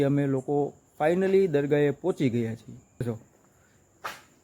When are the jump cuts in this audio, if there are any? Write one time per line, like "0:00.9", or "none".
0:03.1